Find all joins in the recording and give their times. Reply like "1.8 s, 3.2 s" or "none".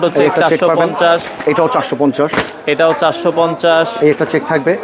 none